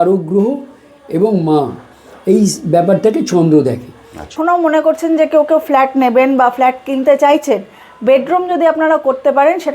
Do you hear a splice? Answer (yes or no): yes